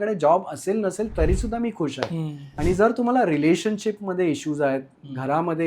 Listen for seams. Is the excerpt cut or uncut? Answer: cut